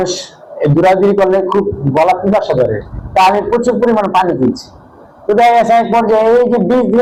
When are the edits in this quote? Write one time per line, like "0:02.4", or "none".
none